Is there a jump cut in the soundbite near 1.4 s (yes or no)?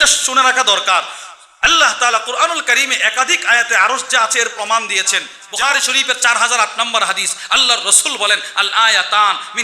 no